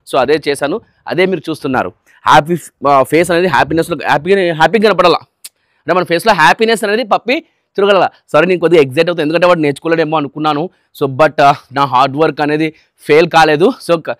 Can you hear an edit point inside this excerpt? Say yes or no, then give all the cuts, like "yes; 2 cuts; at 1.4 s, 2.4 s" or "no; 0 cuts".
yes; 1 cut; at 2.1 s